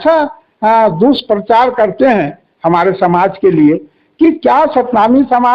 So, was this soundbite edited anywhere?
no; 0 cuts

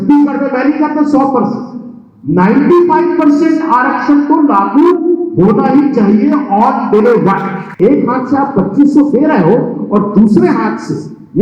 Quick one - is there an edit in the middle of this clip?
yes; 1 cut; at 7.8 s

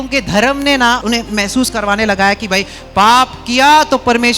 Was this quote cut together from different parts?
yes; 1 cut; at 1.0 s

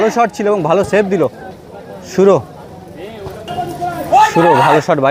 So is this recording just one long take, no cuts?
yes; 0 cuts

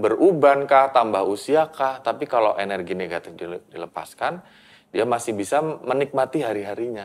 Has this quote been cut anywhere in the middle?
no; 0 cuts

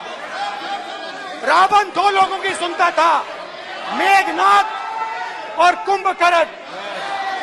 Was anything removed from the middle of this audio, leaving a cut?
no; 0 cuts

